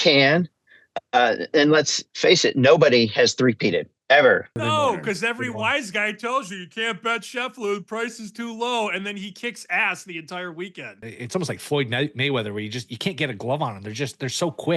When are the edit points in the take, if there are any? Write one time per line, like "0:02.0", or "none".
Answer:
0:04.5
0:10.9